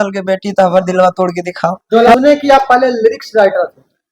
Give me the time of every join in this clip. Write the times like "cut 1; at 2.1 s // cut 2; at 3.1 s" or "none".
cut 1; at 2.2 s